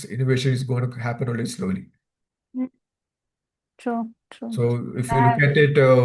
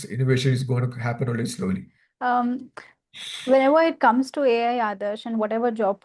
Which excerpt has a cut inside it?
second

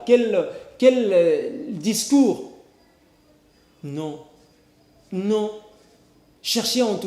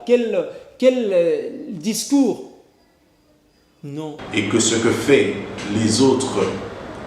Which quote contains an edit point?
second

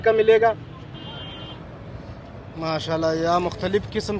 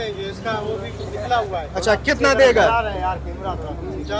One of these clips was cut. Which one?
first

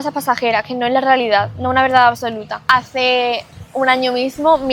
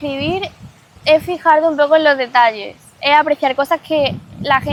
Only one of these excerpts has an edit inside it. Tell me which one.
first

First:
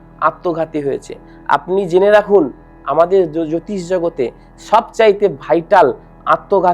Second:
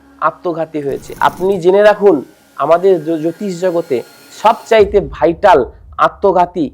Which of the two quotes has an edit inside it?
second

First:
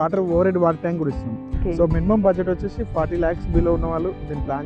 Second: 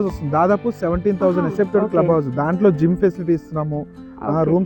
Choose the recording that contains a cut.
first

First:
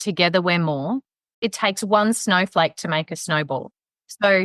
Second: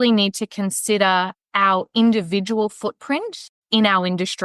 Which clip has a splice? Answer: first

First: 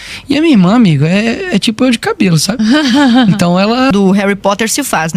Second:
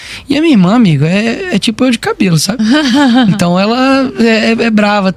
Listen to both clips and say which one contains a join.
first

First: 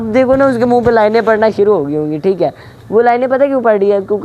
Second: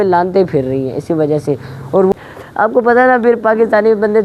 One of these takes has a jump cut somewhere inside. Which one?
second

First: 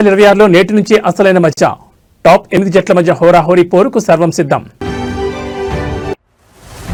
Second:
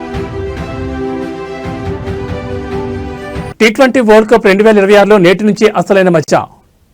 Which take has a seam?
second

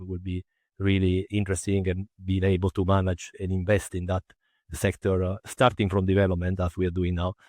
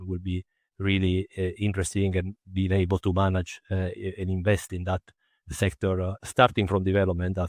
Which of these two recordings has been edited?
first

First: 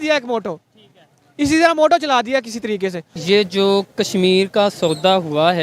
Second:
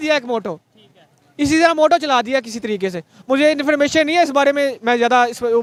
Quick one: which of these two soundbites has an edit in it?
first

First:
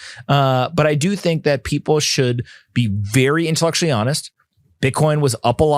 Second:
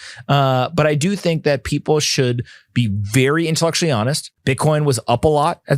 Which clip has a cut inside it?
second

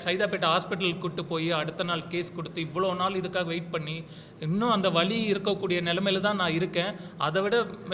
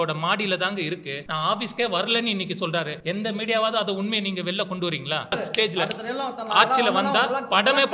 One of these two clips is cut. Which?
second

